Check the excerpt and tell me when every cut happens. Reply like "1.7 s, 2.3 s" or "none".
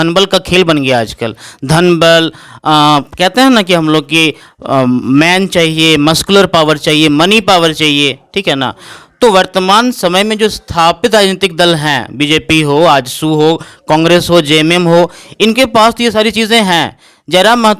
none